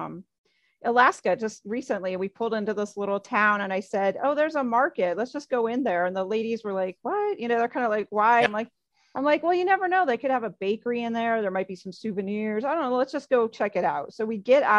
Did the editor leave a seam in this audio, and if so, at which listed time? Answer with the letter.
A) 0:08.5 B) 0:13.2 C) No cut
A